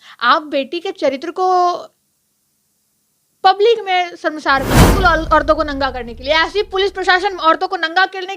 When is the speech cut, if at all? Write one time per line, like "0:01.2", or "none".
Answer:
0:04.9